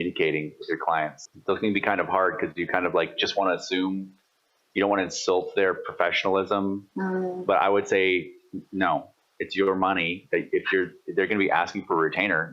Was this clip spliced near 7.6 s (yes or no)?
no